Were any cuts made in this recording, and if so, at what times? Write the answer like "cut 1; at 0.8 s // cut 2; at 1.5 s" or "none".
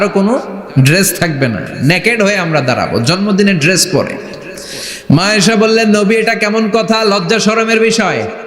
none

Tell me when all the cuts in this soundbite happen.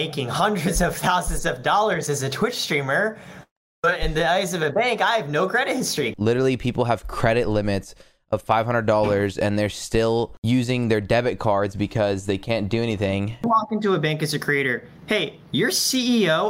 cut 1; at 6.1 s // cut 2; at 10.4 s // cut 3; at 13.4 s

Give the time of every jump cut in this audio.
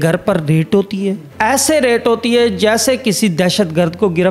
cut 1; at 1.3 s

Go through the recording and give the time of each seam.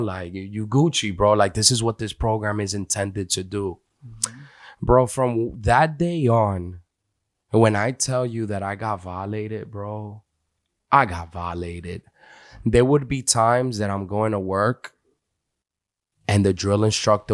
none

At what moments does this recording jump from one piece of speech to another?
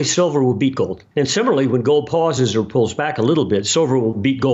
cut 1; at 1.0 s

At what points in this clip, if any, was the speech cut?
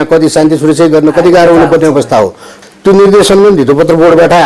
cut 1; at 2.6 s

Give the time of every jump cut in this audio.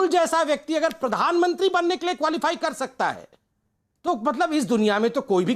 none

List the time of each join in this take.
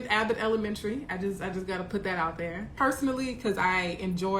cut 1; at 2.7 s

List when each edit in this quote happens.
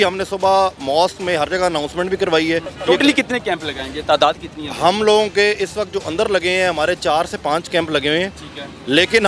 cut 1; at 2.7 s

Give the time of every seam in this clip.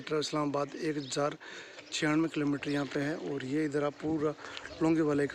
none

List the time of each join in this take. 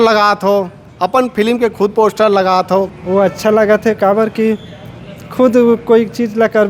none

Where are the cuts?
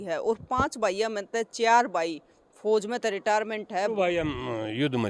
cut 1; at 3.9 s

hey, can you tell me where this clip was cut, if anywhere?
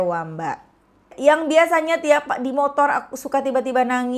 cut 1; at 1.1 s

